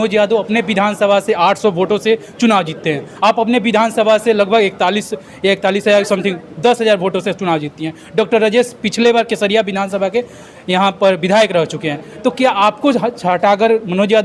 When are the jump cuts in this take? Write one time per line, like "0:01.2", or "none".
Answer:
none

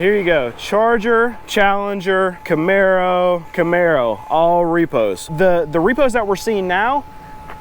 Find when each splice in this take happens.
0:01.4
0:02.4
0:03.5
0:05.3

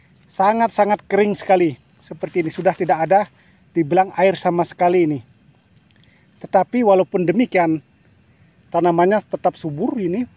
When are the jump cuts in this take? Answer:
none

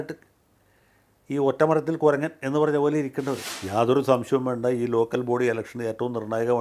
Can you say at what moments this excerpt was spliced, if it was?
0:03.5

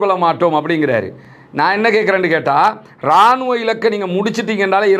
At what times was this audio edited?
none

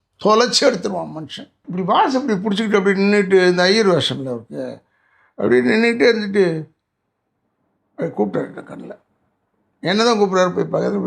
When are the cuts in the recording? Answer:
0:01.6

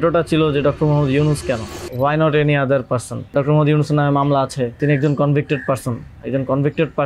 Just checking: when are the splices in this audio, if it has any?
0:01.8
0:03.3
0:04.8

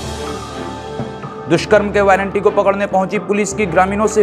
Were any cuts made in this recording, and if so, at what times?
0:01.1

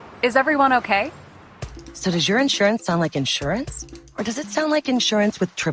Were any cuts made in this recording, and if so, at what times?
0:01.5

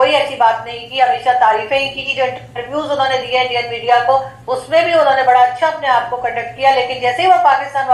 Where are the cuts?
none

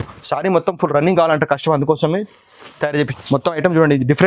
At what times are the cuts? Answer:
0:03.1

